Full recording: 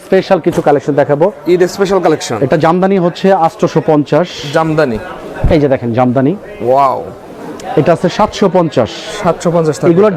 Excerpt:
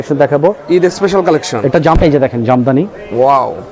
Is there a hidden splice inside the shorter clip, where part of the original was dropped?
yes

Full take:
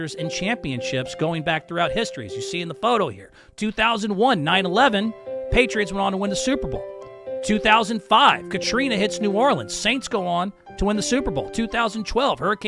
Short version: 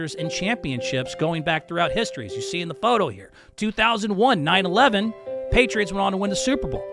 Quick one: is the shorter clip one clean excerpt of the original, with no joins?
yes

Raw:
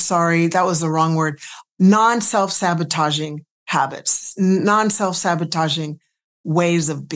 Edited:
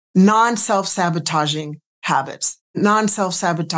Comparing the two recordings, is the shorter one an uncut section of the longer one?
no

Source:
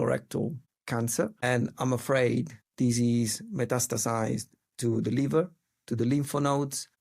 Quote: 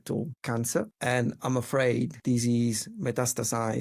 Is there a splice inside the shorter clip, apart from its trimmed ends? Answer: yes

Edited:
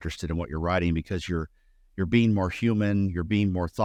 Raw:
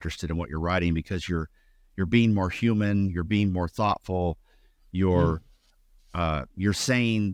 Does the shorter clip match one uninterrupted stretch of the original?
yes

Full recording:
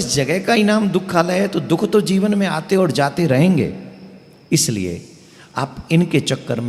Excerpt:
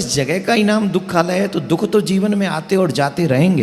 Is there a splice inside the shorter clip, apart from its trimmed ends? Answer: no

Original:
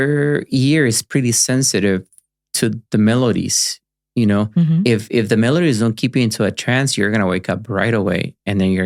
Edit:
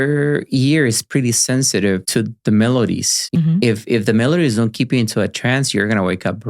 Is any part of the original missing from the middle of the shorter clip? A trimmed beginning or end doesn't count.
yes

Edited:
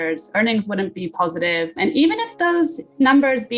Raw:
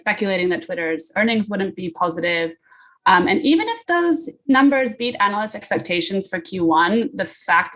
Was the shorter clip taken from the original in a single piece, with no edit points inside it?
no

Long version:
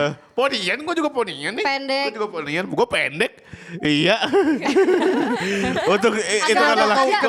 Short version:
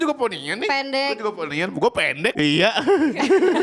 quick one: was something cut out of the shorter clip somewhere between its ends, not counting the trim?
yes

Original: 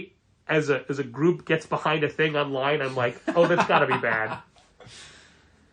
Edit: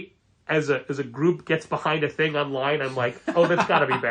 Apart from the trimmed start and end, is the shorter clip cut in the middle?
no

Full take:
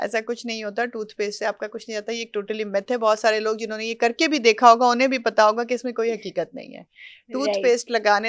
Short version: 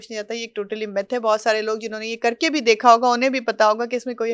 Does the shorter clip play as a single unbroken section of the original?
yes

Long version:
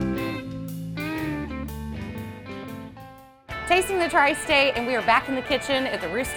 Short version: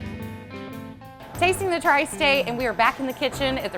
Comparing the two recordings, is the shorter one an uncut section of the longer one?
no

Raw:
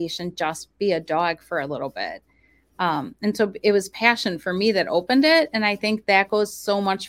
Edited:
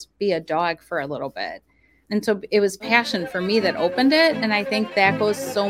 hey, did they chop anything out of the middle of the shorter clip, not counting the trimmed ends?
yes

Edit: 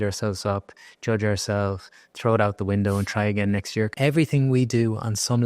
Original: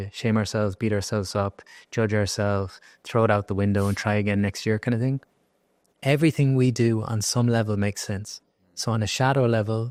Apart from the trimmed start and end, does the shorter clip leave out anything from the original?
yes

